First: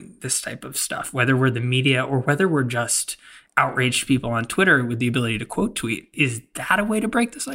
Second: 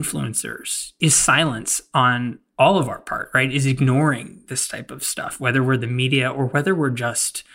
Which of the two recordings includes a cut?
first; 1 cut; at 6.1 s

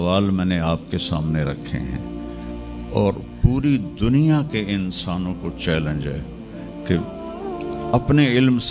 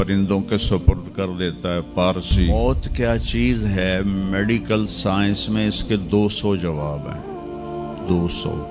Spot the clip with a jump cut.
second; 1 cut; at 2.5 s

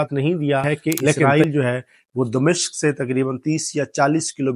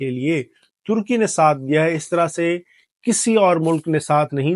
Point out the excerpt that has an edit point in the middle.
first; 1 cut; at 1.3 s

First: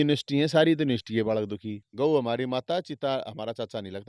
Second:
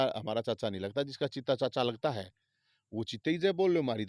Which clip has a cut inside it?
first; 1 cut; at 1.8 s

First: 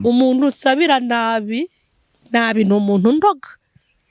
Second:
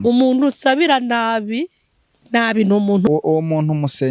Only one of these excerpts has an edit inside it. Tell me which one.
second; 1 cut; at 3.1 s

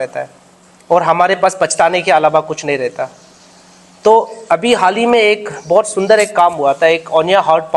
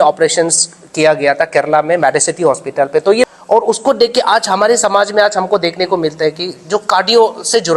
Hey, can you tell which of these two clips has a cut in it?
second; 1 cut; at 3.3 s

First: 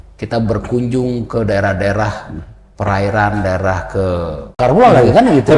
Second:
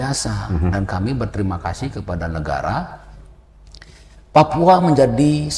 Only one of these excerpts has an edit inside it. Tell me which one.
first; 1 cut; at 4.6 s

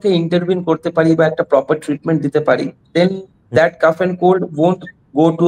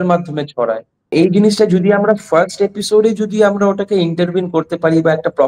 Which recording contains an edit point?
second; 1 cut; at 1.1 s

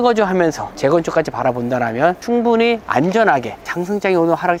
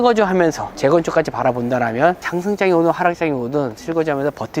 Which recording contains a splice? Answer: second; 1 cut; at 2.2 s

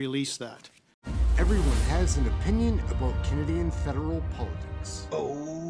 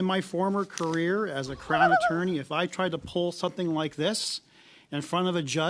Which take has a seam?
first; 1 cut; at 1.1 s

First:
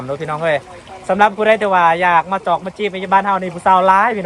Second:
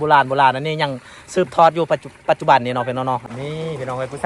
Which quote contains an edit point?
second; 1 cut; at 3.3 s

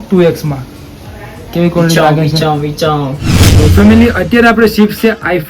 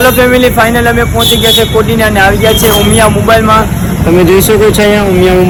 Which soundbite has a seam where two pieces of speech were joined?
first; 1 cut; at 3.2 s

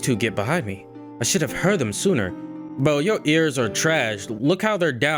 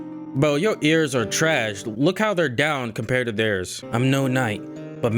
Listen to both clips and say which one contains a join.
second; 1 cut; at 3.8 s

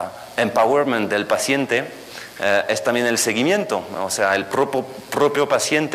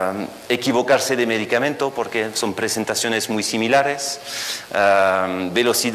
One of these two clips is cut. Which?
first; 1 cut; at 2.3 s

